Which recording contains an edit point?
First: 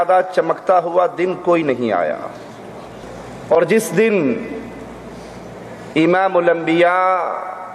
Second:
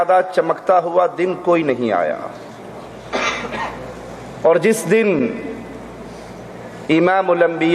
first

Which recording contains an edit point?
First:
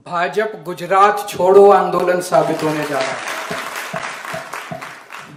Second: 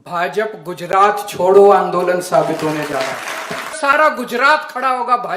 second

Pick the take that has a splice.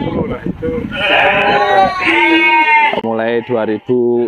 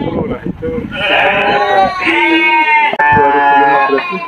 second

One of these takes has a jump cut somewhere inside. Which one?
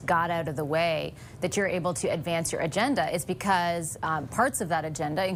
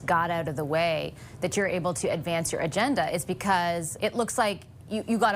second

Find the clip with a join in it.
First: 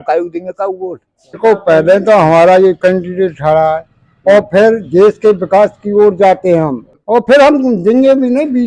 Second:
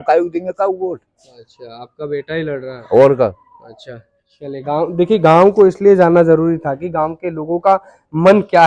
first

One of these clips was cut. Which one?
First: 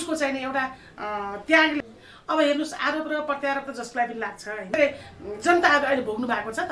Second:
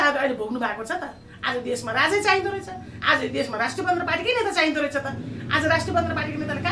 first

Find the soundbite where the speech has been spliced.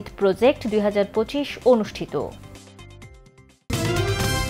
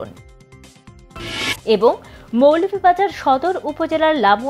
first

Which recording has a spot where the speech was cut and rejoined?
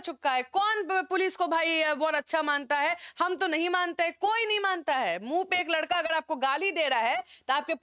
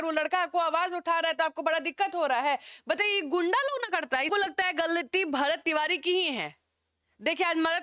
second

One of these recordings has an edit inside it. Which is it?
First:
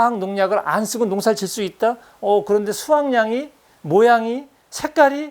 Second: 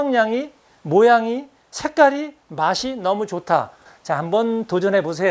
second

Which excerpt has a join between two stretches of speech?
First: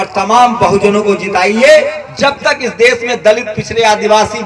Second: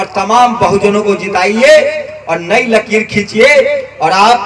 first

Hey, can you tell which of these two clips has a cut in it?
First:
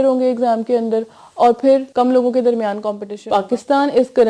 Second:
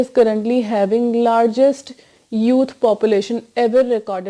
first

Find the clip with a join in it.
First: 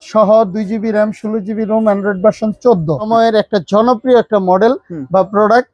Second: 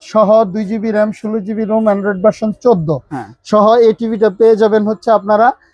first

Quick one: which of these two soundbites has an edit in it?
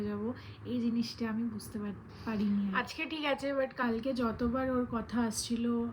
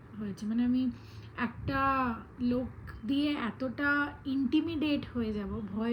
first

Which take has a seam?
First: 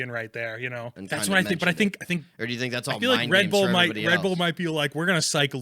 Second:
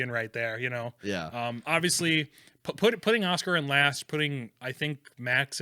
first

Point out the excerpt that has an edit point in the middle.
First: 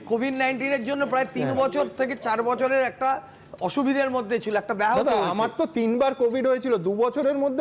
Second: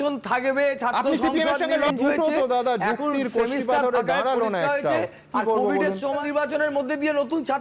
second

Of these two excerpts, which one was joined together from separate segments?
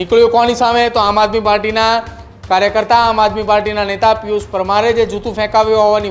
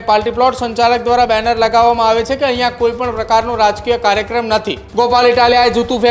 second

